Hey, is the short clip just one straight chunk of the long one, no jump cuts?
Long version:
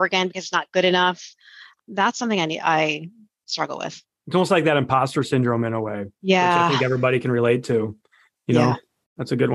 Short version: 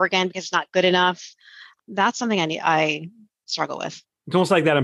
yes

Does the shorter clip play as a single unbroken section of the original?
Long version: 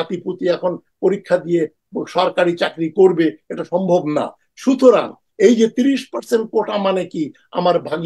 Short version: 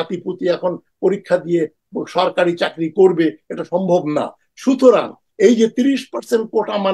yes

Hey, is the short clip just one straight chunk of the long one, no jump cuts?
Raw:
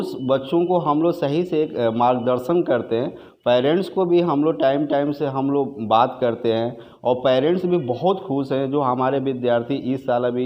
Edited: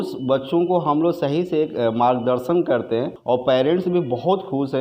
no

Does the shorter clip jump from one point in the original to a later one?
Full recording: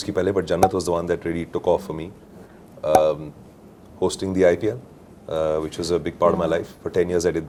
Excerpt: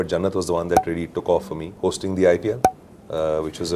yes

